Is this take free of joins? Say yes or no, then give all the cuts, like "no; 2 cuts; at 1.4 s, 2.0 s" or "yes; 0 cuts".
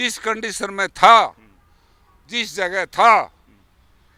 yes; 0 cuts